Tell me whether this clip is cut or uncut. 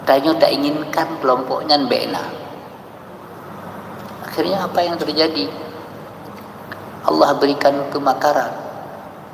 uncut